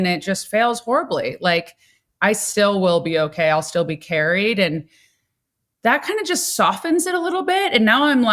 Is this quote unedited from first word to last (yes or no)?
yes